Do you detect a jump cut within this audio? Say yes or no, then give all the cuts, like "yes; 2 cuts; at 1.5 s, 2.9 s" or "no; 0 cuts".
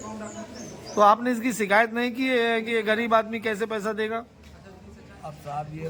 no; 0 cuts